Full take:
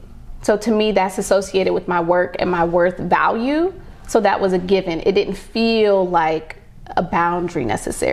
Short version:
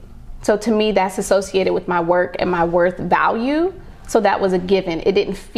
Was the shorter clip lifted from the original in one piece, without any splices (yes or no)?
yes